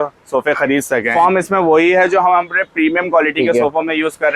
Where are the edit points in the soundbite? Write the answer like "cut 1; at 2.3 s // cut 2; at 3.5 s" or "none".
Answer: cut 1; at 1.1 s